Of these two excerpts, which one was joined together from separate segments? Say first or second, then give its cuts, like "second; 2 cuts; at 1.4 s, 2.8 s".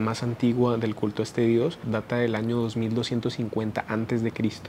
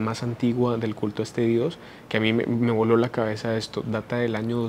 first; 1 cut; at 1.9 s